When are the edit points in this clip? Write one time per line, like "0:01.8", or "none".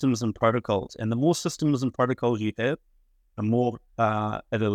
none